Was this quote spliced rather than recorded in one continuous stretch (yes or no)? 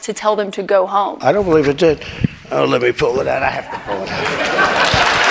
no